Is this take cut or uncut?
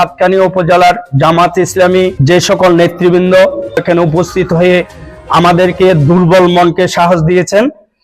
cut